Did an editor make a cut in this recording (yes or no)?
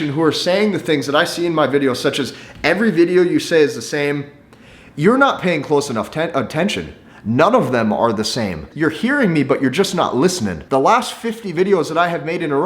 yes